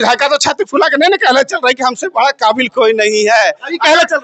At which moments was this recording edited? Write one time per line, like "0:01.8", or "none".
none